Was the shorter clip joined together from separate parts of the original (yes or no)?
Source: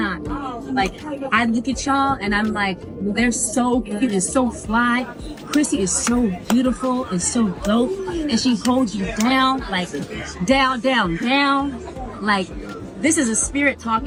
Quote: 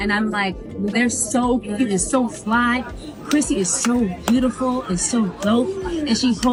no